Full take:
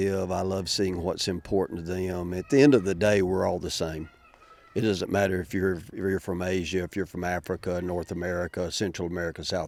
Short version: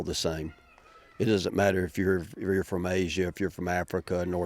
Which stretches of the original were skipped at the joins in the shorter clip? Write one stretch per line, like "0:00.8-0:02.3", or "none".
none